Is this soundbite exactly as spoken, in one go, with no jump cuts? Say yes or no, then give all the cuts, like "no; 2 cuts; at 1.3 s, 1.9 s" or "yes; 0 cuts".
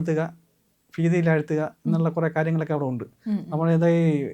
yes; 0 cuts